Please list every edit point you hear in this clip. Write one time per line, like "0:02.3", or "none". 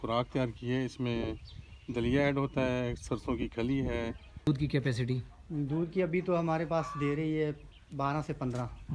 0:04.5